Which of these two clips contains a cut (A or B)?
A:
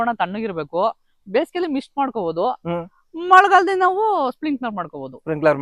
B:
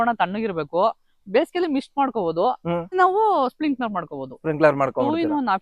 B